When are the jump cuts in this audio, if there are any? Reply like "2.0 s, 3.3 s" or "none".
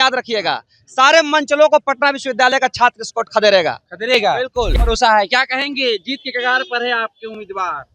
4.7 s